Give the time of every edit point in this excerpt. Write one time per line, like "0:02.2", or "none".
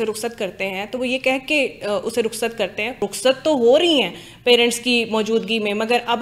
0:02.9